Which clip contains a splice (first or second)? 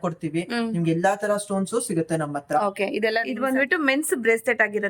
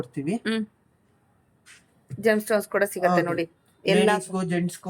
first